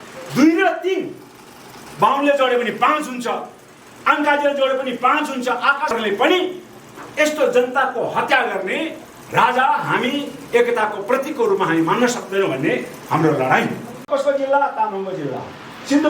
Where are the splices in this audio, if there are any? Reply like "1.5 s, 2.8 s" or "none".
5.9 s